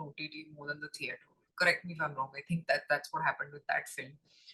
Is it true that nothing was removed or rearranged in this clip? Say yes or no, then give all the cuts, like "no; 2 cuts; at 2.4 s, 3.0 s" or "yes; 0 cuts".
yes; 0 cuts